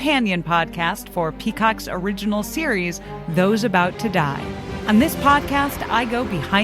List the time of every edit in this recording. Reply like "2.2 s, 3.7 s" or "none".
4.7 s